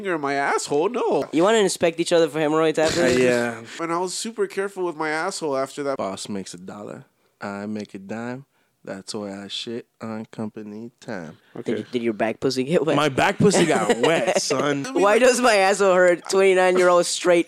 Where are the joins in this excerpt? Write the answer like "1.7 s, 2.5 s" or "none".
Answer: 1.3 s, 3.7 s, 6.0 s, 11.5 s, 14.9 s